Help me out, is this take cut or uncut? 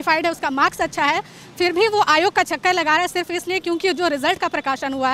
uncut